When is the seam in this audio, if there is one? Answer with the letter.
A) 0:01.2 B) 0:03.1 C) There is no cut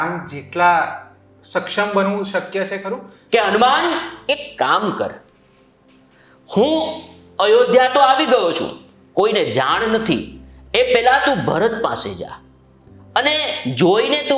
B